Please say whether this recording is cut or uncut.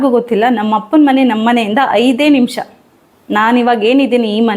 uncut